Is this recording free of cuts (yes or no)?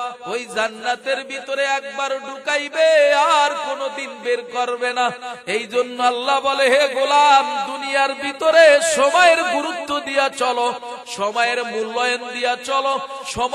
yes